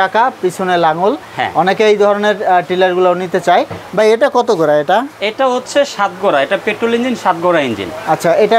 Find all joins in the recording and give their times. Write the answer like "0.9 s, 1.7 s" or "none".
none